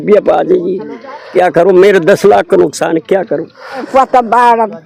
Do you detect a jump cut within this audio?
yes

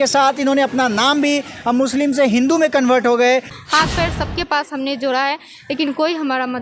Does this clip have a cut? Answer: yes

